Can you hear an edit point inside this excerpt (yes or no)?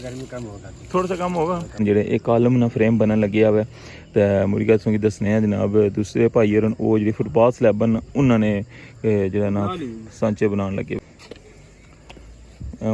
yes